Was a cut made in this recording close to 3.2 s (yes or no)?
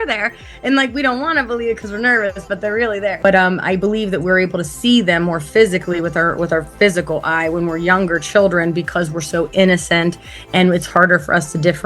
yes